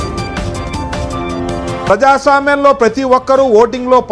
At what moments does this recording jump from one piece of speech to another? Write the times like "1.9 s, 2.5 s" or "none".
none